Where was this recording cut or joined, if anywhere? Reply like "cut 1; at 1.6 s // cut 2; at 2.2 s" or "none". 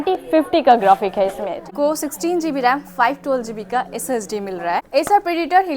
cut 1; at 1.7 s // cut 2; at 4.9 s